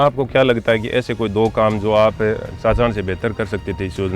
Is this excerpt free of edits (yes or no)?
yes